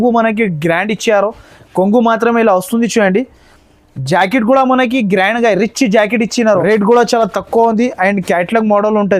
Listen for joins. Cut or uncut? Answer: cut